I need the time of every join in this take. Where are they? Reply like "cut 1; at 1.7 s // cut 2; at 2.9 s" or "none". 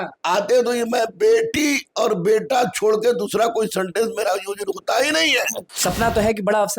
cut 1; at 5.6 s